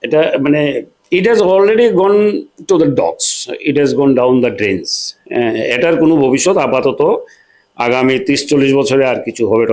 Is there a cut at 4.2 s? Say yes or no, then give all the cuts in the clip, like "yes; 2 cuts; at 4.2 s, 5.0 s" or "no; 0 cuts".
no; 1 cut; at 0.9 s